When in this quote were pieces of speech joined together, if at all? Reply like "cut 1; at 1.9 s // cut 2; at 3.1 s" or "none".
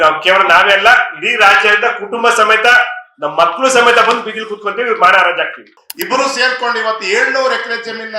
cut 1; at 5.7 s